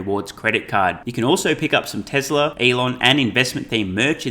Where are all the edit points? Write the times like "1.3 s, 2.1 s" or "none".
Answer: 2.5 s